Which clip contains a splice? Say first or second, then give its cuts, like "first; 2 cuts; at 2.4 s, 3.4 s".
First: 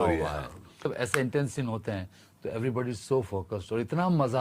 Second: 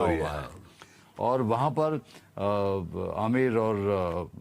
first; 1 cut; at 0.9 s